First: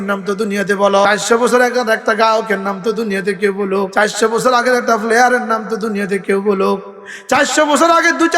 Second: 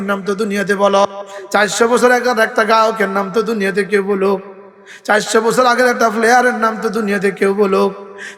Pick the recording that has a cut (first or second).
first